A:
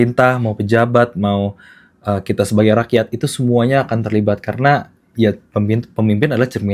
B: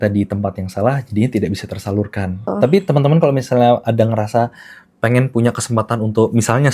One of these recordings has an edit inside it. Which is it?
B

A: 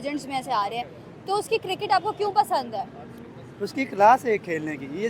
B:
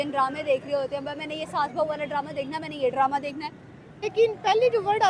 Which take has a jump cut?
B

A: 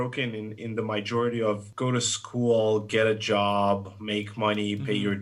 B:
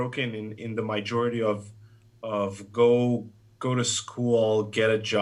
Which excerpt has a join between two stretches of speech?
A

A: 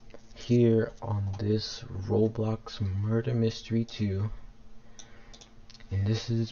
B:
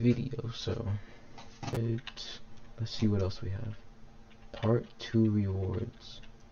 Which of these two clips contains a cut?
B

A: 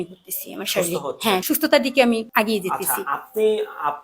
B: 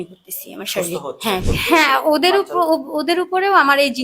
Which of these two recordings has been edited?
B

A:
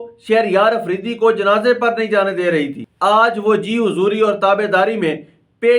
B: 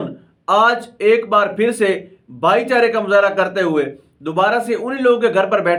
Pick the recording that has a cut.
A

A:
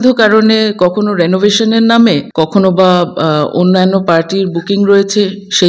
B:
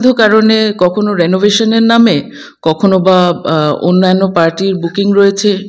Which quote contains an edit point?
A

